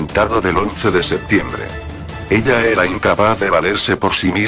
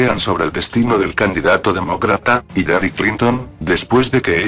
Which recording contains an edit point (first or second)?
first